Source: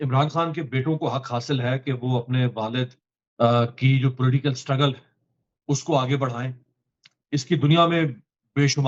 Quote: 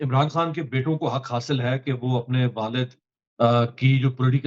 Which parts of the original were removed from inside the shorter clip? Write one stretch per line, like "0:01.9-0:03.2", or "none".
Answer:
none